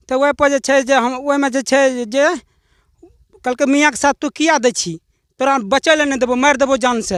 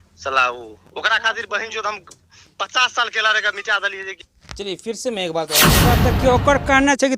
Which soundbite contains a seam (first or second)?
second